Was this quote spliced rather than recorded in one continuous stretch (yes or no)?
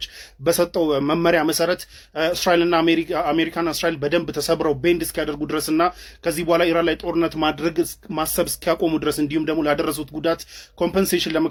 no